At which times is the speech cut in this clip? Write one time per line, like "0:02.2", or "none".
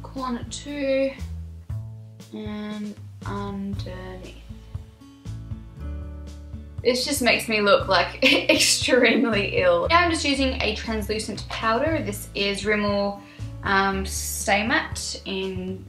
0:14.8

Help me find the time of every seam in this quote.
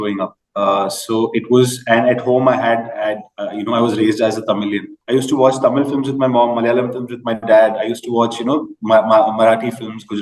0:04.9

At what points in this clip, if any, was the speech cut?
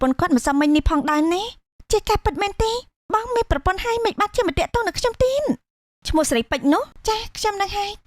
0:06.0

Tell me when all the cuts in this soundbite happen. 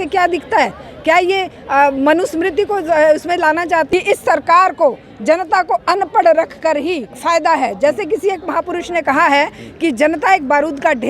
0:03.9
0:07.1

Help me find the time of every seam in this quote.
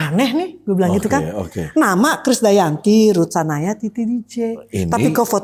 none

